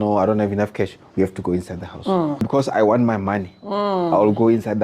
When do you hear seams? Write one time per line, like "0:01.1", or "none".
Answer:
0:02.5